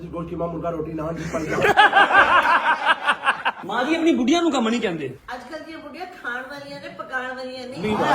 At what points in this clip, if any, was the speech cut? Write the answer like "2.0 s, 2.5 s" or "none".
3.6 s, 5.2 s